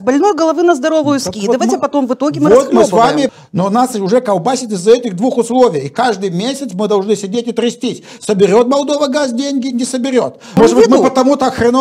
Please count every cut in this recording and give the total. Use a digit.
2